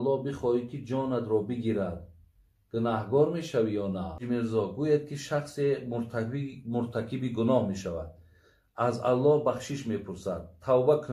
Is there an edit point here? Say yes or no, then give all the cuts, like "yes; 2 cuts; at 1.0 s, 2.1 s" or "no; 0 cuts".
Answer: yes; 1 cut; at 4.2 s